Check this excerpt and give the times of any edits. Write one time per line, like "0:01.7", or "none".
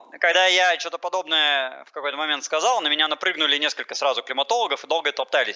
none